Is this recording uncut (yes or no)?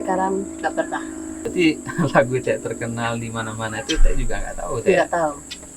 no